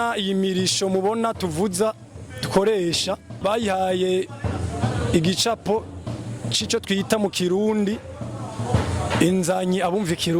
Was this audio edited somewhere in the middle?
yes; 1 cut; at 3.4 s

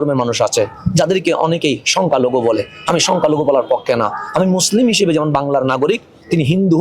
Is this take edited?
no; 0 cuts

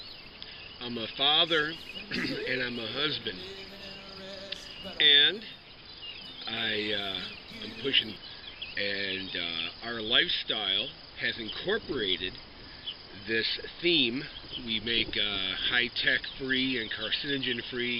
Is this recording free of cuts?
yes; 0 cuts

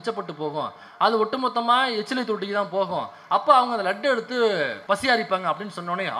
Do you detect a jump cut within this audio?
yes; 1 cut; at 4.8 s

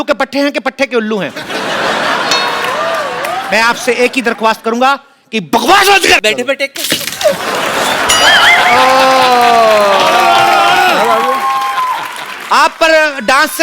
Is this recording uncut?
no; 1 cut; at 6.2 s

